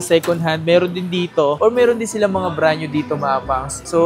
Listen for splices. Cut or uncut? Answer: uncut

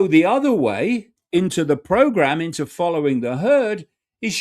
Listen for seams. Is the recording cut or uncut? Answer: cut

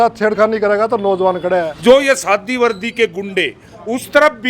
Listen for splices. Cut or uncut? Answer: cut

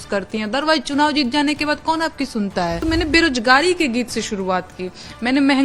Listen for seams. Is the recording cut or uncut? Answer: cut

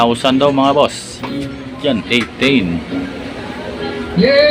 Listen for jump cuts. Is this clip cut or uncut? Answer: cut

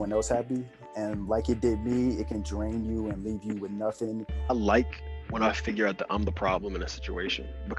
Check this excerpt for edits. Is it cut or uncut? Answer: cut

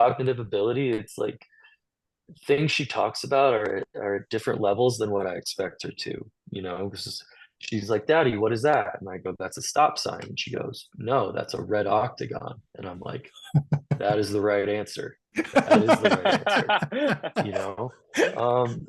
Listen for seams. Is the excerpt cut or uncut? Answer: uncut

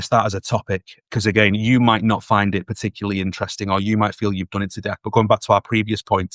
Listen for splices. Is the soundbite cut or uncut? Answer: cut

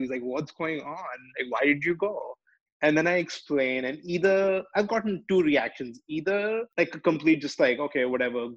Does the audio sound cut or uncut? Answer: cut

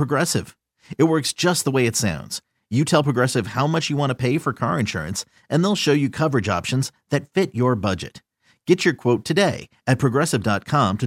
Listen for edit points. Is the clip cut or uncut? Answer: uncut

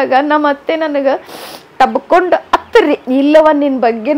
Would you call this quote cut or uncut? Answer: cut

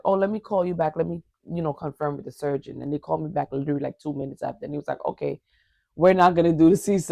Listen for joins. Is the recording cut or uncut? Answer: uncut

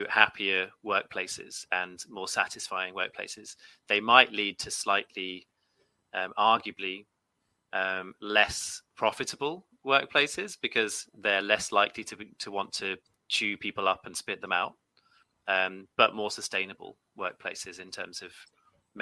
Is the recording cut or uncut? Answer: uncut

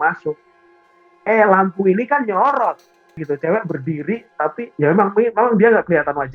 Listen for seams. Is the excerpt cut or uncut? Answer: cut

